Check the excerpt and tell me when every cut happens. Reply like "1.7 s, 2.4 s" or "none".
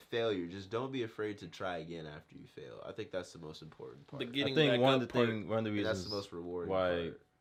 none